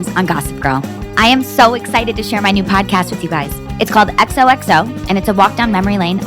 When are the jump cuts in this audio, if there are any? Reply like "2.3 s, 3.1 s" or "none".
1.0 s